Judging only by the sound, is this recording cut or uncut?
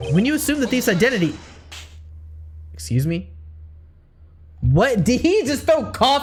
uncut